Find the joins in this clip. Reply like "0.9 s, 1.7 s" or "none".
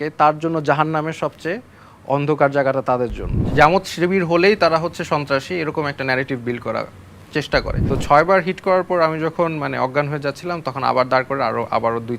3.4 s, 7.8 s